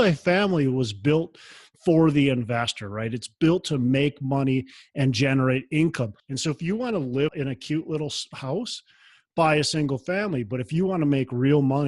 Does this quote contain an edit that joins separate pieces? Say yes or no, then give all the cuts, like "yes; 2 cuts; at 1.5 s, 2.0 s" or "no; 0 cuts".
yes; 2 cuts; at 6.2 s, 7.3 s